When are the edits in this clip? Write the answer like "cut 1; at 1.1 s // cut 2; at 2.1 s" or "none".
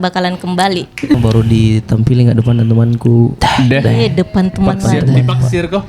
cut 1; at 1.1 s